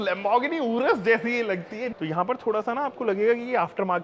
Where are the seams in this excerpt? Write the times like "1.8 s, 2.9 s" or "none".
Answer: 1.9 s